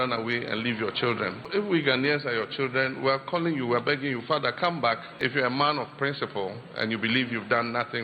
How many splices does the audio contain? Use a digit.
2